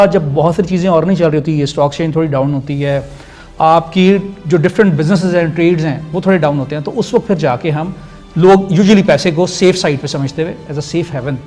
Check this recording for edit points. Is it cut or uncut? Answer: uncut